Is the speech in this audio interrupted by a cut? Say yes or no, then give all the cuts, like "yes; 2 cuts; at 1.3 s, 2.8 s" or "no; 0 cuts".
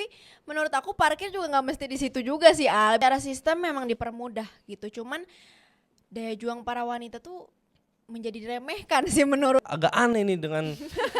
yes; 2 cuts; at 3.0 s, 9.6 s